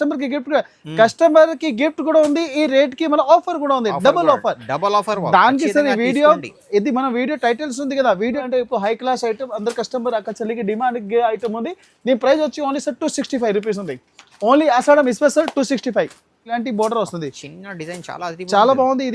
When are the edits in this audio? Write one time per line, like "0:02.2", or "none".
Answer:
0:08.4
0:16.5